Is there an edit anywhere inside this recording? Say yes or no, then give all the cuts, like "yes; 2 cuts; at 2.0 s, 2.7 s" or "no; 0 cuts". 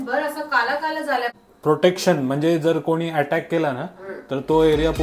yes; 1 cut; at 1.4 s